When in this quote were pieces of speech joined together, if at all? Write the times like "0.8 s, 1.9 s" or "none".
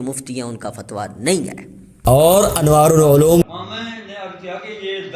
3.4 s